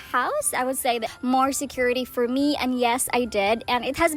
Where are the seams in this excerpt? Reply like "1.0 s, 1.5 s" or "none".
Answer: 1.1 s